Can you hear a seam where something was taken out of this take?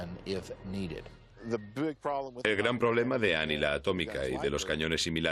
no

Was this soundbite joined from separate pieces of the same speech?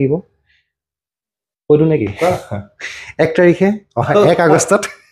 no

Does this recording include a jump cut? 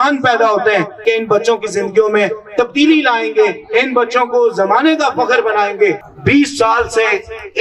yes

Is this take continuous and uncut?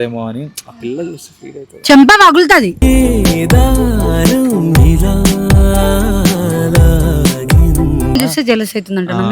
no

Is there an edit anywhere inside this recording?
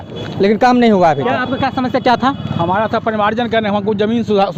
no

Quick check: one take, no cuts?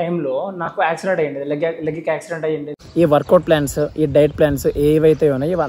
no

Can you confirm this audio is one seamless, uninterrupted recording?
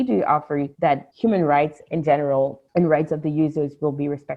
no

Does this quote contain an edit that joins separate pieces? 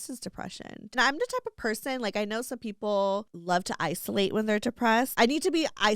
yes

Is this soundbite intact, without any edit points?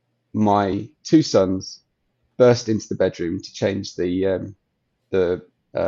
yes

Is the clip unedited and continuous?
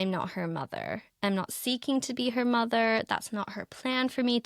yes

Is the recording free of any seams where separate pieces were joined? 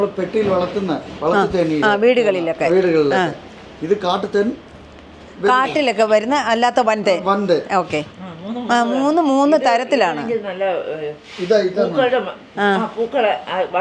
no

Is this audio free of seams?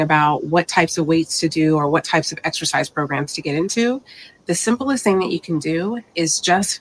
no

